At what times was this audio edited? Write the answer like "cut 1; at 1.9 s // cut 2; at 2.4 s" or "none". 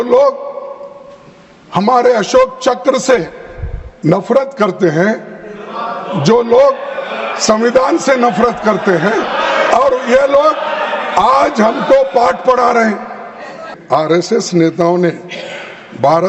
cut 1; at 13.7 s